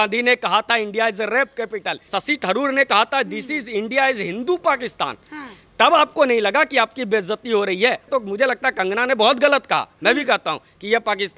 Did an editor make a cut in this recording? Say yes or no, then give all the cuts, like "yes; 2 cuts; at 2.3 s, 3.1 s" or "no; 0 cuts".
yes; 2 cuts; at 2.1 s, 8.1 s